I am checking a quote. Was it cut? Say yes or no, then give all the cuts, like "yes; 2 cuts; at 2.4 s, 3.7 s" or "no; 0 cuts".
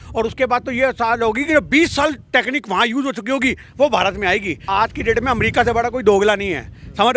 yes; 1 cut; at 4.6 s